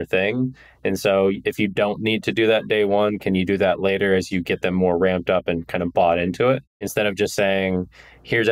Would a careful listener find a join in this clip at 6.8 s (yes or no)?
yes